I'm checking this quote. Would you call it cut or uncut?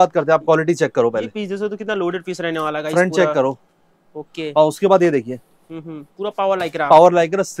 uncut